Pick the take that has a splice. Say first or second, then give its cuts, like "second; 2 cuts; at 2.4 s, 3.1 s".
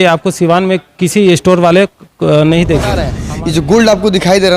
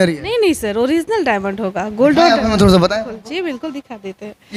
first; 1 cut; at 3.1 s